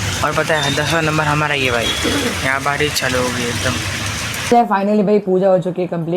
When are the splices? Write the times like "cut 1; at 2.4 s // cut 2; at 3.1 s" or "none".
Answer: cut 1; at 4.3 s